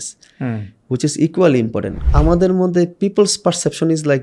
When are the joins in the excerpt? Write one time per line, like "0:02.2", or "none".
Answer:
0:02.0

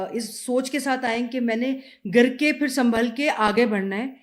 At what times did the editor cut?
none

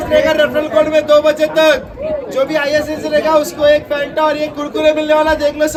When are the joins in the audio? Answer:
none

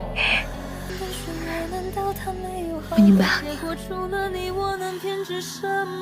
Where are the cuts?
0:00.9

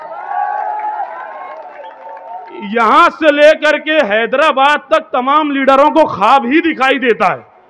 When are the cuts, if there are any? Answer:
none

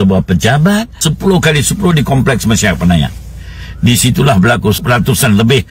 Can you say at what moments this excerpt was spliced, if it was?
0:01.1
0:04.8

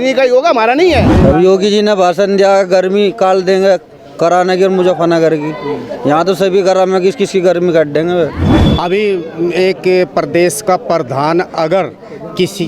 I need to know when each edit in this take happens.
0:01.1
0:08.4

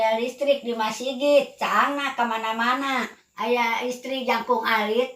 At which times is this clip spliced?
0:03.2

